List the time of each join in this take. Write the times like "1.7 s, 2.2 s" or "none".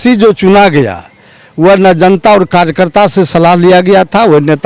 none